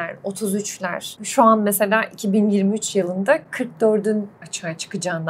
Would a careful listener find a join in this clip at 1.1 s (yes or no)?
yes